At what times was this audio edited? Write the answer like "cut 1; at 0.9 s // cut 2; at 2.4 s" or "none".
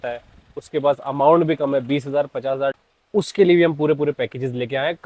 cut 1; at 2.8 s